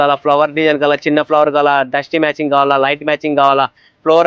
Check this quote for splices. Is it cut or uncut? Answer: uncut